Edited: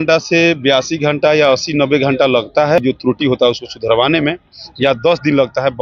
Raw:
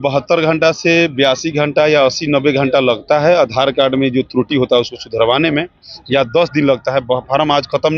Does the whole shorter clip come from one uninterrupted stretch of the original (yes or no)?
no